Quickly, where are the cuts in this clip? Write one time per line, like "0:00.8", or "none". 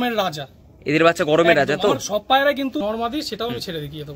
0:02.8